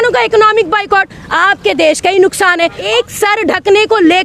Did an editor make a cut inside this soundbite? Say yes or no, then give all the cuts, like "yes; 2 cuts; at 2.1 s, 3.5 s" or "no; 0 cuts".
yes; 1 cut; at 2.8 s